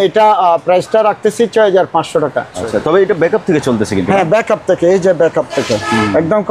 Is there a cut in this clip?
yes; 1 cut; at 2.5 s

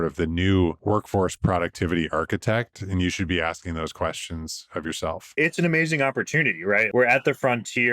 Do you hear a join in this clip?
yes; 3 cuts; at 0.8 s, 5.2 s, 6.8 s

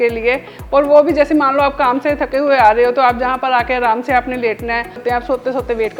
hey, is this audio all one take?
no; 1 cut; at 5.0 s

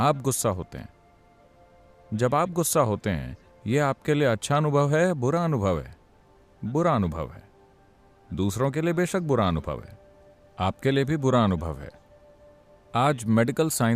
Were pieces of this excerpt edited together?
no; 0 cuts

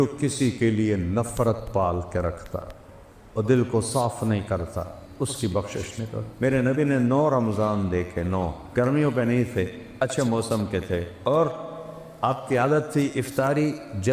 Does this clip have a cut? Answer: yes; 3 cuts; at 6.2 s, 8.6 s, 11.1 s

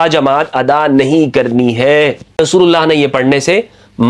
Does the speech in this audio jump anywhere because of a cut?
yes; 1 cut; at 2.4 s

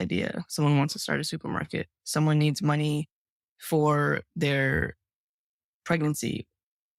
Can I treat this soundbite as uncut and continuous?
yes; 0 cuts

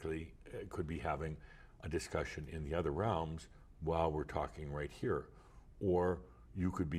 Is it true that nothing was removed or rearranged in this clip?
yes; 0 cuts

